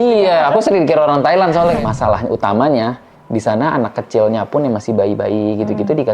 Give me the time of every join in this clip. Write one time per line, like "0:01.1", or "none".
0:01.8